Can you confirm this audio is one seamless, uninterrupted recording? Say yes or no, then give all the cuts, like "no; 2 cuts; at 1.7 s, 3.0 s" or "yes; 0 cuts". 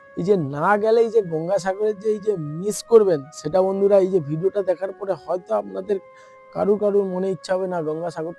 yes; 0 cuts